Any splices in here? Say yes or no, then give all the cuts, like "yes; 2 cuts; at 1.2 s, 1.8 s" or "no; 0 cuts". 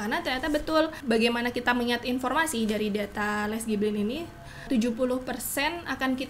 yes; 2 cuts; at 1.0 s, 4.7 s